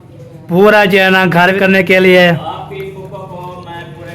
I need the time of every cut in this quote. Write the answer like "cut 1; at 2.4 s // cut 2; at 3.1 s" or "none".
cut 1; at 1.6 s